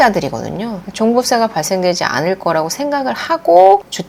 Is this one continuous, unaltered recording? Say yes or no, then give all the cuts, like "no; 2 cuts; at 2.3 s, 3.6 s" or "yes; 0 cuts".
yes; 0 cuts